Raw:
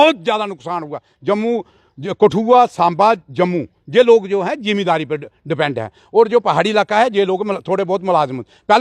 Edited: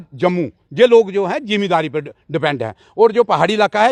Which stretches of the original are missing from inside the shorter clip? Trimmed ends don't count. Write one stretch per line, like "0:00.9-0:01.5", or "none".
none

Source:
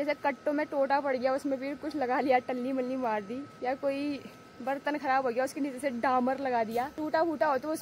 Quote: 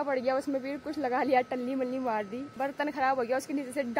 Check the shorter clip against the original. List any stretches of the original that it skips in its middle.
0:03.4-0:04.5

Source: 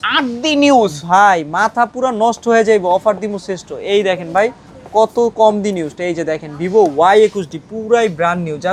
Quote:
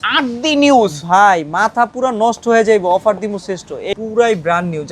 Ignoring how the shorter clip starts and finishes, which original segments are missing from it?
0:03.9-0:07.6

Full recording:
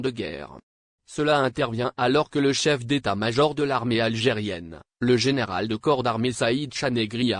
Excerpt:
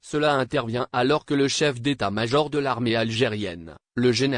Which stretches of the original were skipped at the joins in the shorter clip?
none

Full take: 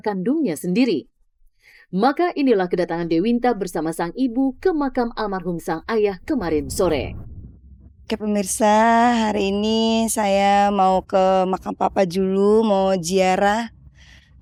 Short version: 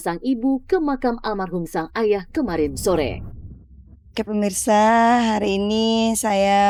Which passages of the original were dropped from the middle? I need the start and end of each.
none

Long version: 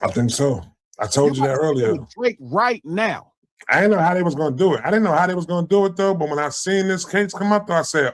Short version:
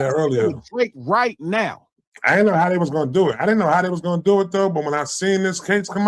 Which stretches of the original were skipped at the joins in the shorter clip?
none

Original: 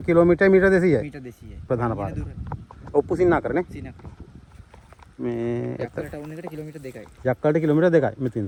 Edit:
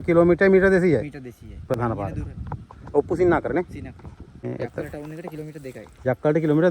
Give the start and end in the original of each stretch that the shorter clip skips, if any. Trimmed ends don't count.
0:04.4-0:05.6

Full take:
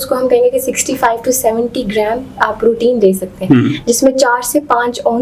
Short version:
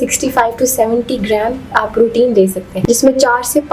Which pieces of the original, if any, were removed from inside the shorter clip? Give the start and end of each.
0:03.4-0:03.8

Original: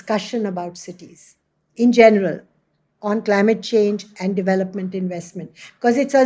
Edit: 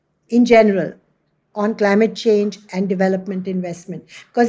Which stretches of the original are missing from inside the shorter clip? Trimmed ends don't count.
none

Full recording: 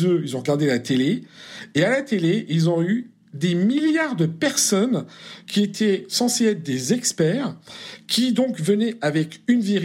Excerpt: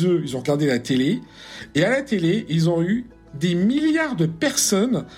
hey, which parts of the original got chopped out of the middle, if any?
none

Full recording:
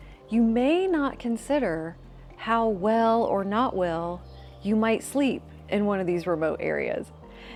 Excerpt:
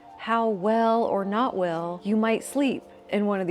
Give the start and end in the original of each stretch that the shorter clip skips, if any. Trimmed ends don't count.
0:04.1-0:04.5

